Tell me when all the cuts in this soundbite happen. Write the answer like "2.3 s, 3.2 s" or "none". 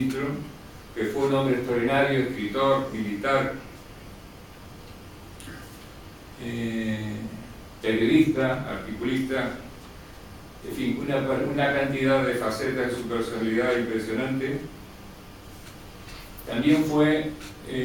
7.1 s